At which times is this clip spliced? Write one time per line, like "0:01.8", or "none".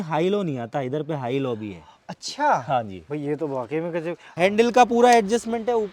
0:04.2